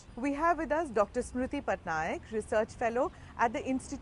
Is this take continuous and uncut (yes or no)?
no